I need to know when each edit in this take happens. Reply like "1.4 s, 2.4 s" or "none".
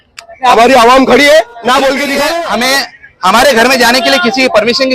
2.2 s